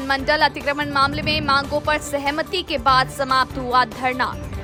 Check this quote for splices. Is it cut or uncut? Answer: uncut